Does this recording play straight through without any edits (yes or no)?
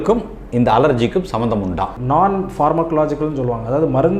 no